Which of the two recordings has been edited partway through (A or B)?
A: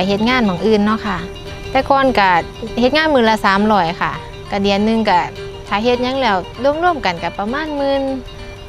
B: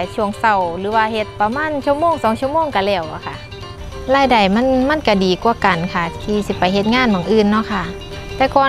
B